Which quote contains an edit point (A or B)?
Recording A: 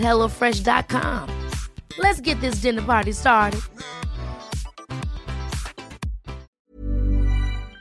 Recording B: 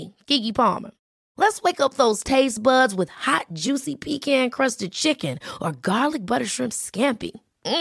A